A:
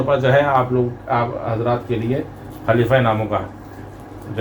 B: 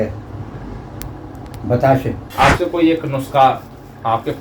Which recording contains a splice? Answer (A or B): B